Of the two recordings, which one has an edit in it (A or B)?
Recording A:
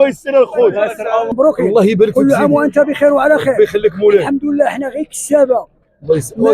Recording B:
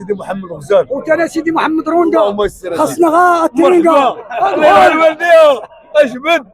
A